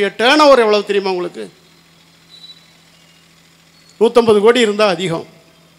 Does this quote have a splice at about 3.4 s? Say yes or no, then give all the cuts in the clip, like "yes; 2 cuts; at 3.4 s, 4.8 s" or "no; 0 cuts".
no; 0 cuts